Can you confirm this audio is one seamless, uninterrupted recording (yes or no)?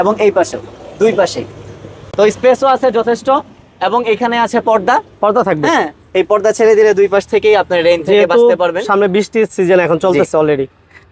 yes